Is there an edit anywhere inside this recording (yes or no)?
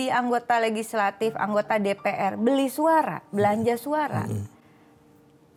no